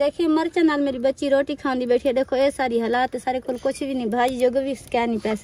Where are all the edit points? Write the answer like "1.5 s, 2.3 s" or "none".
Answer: none